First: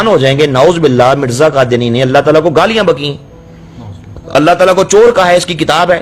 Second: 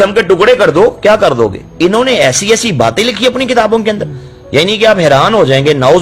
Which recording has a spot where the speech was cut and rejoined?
second; 1 cut; at 1.6 s

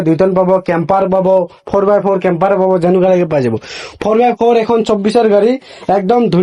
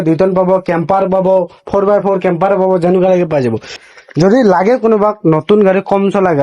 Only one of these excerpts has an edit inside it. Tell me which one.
second; 1 cut; at 3.9 s

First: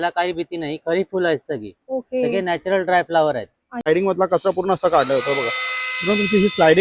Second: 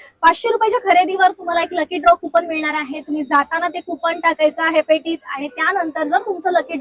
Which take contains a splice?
first; 1 cut; at 3.9 s

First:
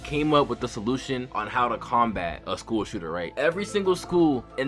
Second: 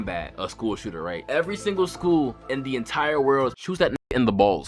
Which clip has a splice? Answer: second; 1 cut; at 3.5 s

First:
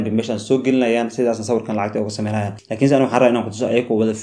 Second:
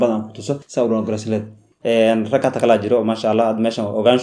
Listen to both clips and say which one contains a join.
second; 1 cut; at 1.7 s

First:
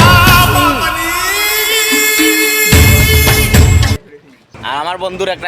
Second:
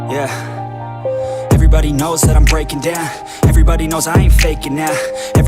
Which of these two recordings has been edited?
first; 1 cut; at 4.6 s

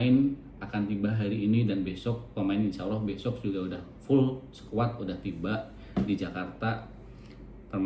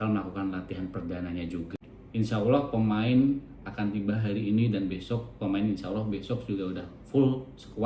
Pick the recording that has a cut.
second; 1 cut; at 1.7 s

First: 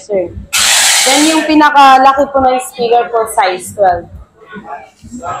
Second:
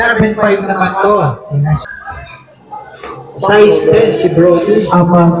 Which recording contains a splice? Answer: second; 1 cut; at 1.8 s

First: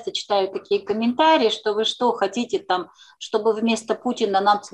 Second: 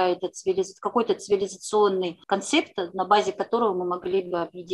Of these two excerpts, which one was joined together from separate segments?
second; 1 cut; at 2.2 s

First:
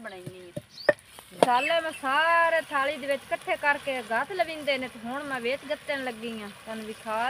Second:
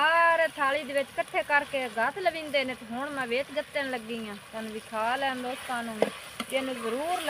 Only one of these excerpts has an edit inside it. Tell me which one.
first; 1 cut; at 1.0 s

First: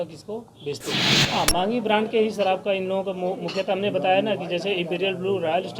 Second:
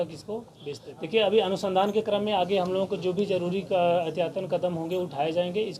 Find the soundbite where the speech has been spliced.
first; 1 cut; at 1.0 s

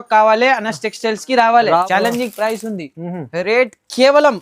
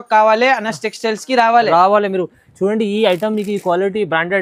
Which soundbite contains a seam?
first; 1 cut; at 1.8 s

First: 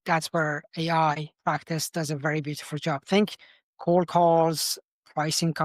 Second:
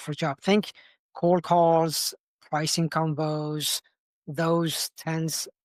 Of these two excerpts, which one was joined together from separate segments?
first; 1 cut; at 1.3 s

